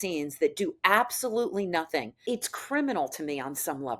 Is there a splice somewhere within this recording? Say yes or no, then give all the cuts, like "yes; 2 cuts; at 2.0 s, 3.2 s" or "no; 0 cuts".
yes; 1 cut; at 2.3 s